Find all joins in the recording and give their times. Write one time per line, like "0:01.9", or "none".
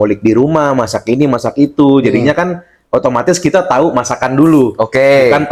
none